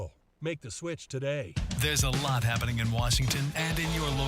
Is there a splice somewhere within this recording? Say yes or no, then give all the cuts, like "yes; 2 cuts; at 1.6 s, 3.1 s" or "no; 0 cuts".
yes; 1 cut; at 1.5 s